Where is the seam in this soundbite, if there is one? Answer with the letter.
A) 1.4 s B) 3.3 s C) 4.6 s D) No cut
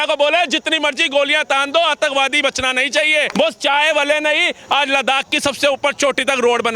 B